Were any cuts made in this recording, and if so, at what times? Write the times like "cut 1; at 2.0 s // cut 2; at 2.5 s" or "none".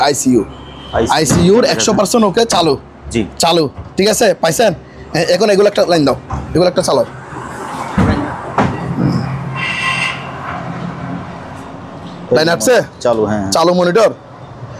none